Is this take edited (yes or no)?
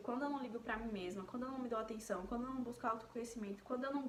no